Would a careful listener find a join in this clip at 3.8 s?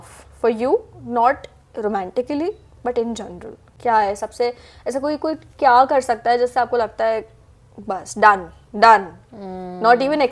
no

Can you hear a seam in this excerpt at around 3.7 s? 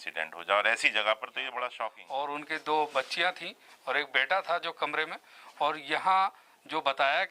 no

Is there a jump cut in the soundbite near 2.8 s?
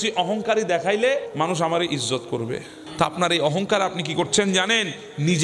yes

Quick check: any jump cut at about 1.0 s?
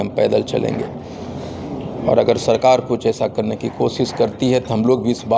no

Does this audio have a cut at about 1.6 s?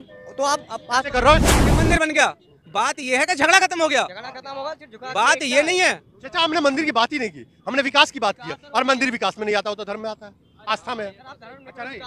yes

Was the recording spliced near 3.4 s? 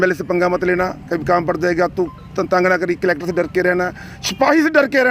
no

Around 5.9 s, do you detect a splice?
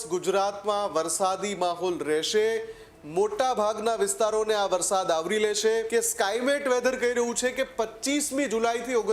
yes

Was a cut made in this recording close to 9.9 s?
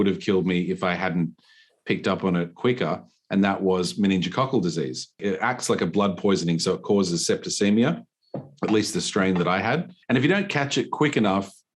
yes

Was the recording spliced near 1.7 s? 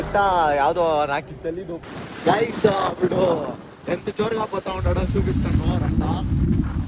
yes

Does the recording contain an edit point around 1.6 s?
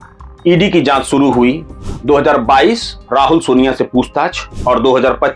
no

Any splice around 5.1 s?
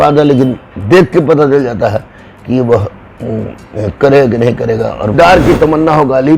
yes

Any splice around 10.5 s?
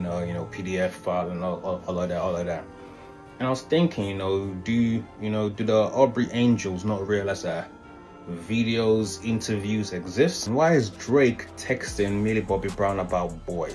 yes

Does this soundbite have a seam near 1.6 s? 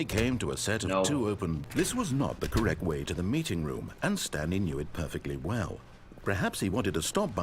yes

